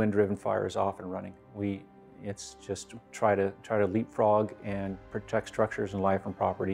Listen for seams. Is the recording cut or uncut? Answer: uncut